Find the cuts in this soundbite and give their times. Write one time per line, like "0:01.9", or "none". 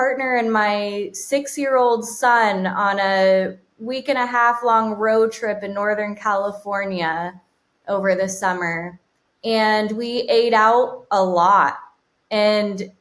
none